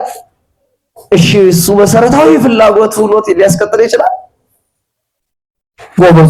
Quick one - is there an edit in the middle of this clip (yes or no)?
no